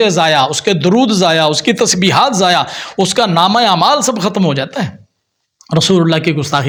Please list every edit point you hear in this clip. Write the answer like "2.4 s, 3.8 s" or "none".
none